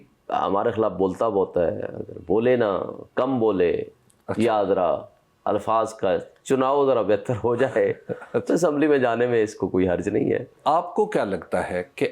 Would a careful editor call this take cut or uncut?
cut